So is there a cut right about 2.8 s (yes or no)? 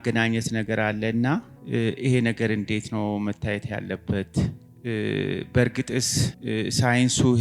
no